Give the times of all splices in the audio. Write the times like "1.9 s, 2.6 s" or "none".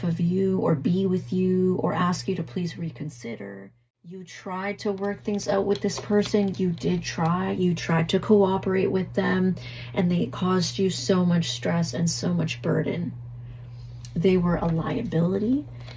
4.3 s